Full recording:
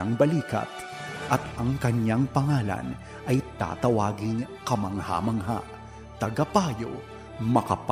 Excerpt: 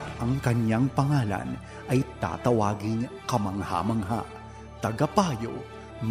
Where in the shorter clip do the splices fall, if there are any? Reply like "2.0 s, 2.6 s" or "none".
none